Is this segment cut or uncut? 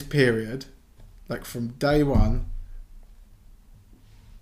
uncut